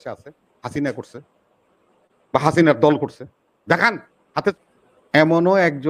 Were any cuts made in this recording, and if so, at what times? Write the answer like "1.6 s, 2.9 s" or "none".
4.5 s

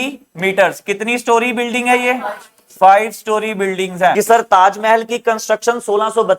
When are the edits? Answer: 4.1 s

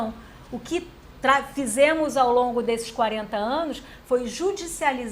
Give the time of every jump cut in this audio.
none

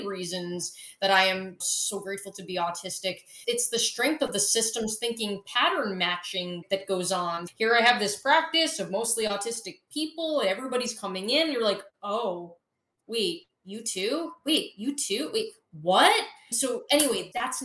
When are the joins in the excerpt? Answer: none

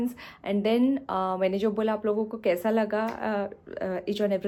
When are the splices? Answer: none

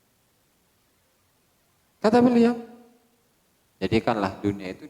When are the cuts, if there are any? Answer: none

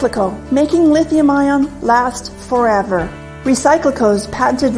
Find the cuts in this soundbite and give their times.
2.2 s

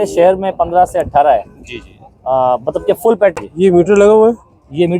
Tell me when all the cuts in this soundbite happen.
3.3 s

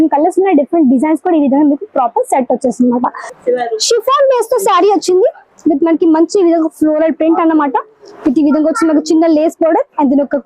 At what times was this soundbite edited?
3.3 s

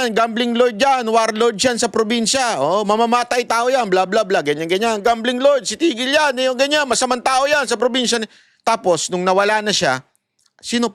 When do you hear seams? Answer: none

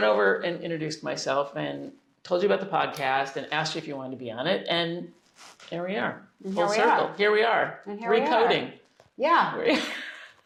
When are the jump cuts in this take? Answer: none

